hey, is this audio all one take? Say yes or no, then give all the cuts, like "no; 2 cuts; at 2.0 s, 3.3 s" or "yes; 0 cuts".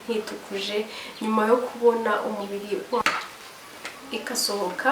no; 1 cut; at 3.0 s